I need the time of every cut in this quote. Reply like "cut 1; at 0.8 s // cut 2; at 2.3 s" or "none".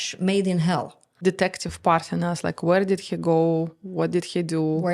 cut 1; at 1.2 s